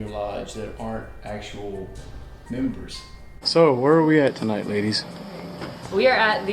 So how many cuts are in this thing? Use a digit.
1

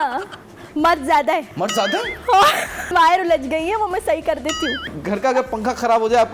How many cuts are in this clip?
3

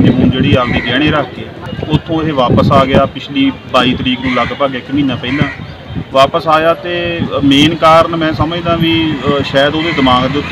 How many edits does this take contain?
1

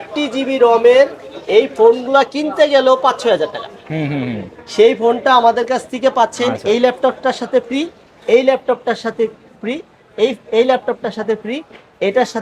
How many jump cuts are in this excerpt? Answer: 0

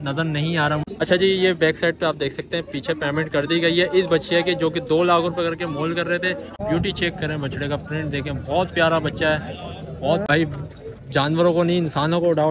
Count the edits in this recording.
3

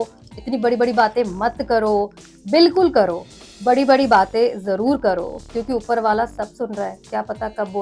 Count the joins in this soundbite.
0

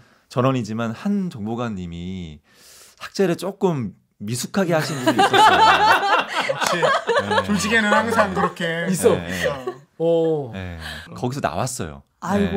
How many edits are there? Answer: 0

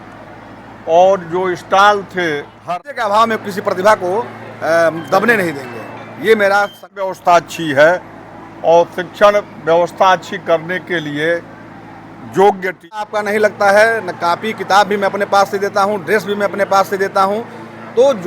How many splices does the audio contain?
3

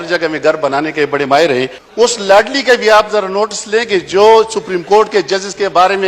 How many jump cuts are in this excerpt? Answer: 1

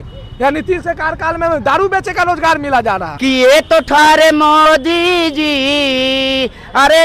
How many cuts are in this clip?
1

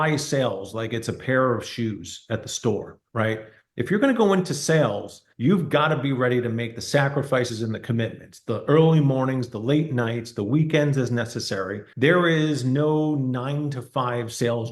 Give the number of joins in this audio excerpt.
0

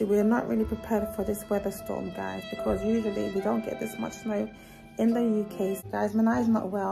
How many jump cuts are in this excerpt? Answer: 1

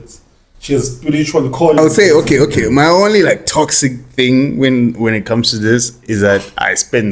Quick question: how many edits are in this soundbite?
1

